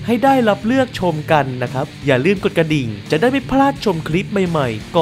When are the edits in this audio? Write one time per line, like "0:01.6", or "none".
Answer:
0:01.9
0:02.9